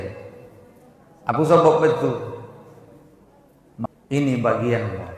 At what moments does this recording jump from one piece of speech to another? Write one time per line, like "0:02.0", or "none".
0:03.9